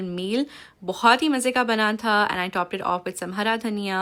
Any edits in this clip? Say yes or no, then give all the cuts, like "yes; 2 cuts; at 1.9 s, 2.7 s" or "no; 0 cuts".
no; 0 cuts